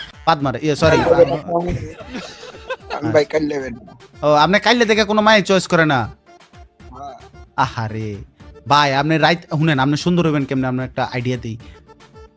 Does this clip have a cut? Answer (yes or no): no